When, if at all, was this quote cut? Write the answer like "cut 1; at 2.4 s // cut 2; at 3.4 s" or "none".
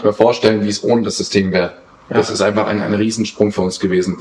none